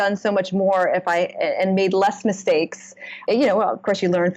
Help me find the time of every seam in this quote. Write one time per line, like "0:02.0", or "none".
0:03.2